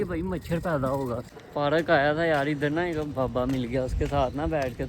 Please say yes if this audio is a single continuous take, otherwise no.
no